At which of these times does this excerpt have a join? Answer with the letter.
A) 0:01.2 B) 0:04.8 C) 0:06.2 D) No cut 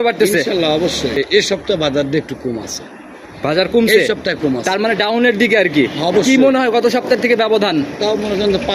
A